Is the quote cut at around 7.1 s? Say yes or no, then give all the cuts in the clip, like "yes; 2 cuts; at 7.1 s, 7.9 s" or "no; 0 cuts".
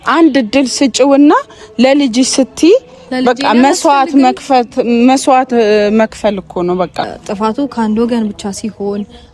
yes; 1 cut; at 7.1 s